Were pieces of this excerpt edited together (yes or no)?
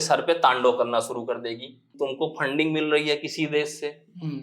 yes